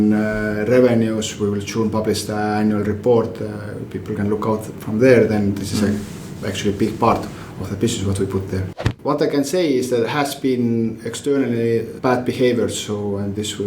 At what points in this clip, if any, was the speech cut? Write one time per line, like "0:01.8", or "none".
0:08.8
0:11.9